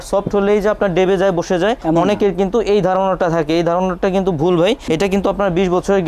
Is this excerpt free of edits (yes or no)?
yes